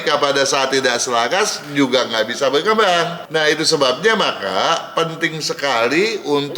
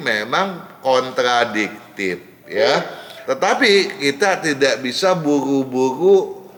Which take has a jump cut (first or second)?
first